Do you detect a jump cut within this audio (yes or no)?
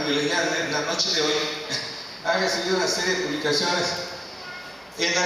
yes